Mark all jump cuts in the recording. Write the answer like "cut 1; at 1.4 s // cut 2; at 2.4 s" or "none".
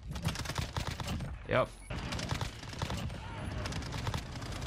cut 1; at 1.9 s